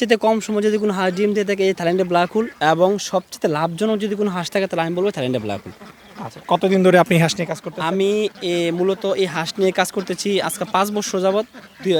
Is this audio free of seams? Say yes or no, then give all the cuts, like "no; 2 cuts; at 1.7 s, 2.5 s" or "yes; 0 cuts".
yes; 0 cuts